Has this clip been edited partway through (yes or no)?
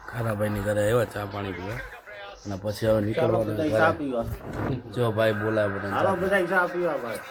no